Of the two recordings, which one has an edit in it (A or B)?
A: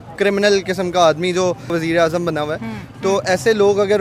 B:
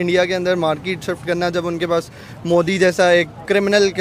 A